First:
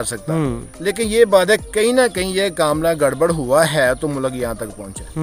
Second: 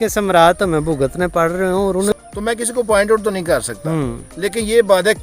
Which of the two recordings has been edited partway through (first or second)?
second